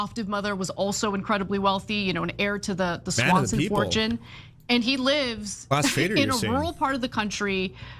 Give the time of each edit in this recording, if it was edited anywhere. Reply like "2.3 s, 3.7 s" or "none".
none